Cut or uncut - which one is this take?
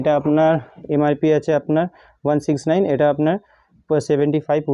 uncut